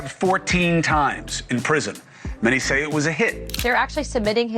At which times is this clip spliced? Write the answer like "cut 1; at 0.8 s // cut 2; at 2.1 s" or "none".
cut 1; at 3.5 s